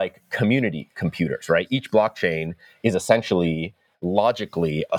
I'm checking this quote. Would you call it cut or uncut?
uncut